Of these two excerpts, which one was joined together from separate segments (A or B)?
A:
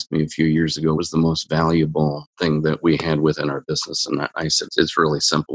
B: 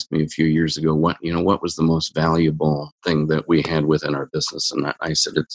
A